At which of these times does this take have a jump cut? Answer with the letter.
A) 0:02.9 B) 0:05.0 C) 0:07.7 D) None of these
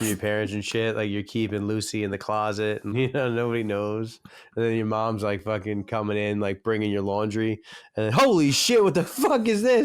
A